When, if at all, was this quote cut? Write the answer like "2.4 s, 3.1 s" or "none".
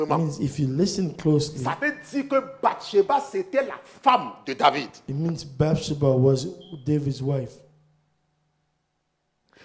none

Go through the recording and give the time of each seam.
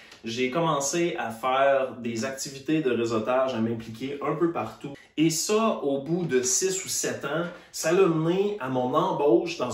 4.8 s

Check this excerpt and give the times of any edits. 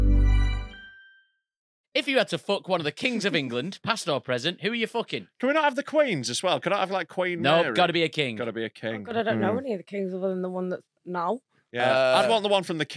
1.7 s

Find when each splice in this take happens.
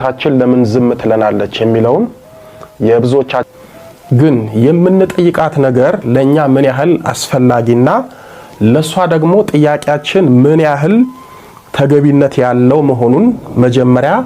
3.4 s

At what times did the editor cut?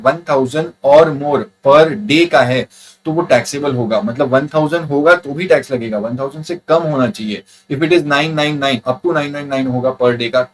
none

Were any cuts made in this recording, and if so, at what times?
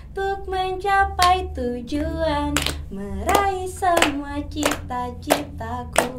none

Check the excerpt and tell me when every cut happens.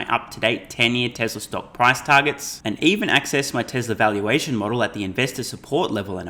none

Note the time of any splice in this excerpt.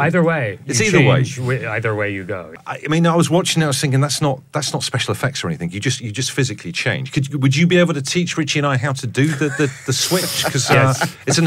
none

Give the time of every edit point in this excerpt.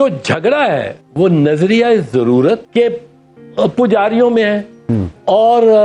1.0 s, 2.7 s

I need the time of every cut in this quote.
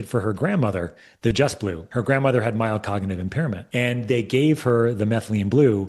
1.8 s, 3.6 s

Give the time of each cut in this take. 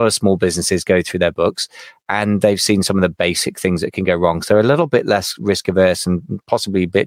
none

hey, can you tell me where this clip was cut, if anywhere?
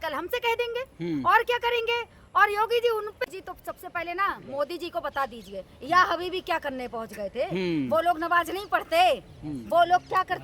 3.3 s

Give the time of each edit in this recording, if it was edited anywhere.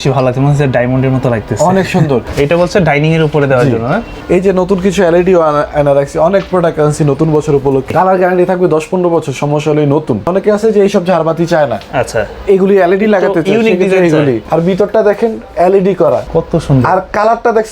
2.3 s, 4.1 s, 7.9 s, 10.3 s, 14.4 s, 16.3 s

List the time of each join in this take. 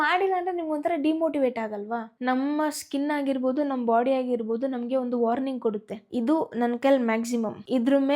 2.0 s

